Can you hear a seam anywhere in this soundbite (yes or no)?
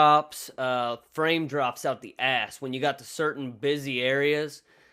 no